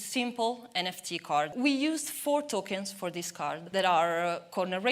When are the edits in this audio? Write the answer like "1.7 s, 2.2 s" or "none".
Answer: 1.5 s, 3.6 s